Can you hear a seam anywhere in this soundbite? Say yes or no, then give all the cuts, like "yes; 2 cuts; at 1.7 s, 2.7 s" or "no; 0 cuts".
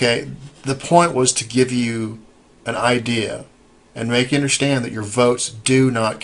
yes; 1 cut; at 3.0 s